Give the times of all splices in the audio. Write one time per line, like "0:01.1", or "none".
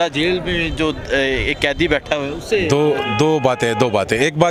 none